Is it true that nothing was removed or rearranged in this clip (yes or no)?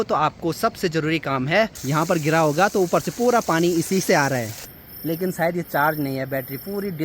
no